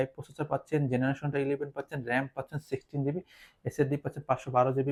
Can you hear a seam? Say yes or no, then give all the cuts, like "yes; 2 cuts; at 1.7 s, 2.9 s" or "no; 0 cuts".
no; 0 cuts